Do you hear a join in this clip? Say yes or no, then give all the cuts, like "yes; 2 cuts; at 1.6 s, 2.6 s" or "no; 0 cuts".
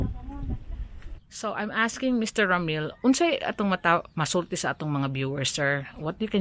yes; 1 cut; at 1.3 s